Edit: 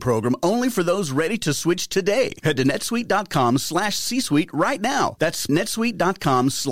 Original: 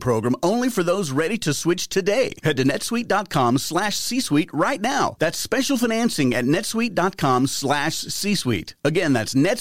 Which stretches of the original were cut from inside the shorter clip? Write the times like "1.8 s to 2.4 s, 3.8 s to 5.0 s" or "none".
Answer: 5.5 s to 6.4 s